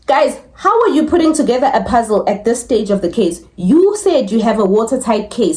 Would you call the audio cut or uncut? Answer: uncut